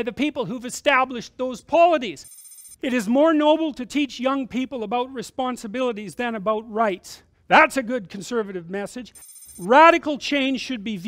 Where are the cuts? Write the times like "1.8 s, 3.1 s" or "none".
2.6 s, 9.2 s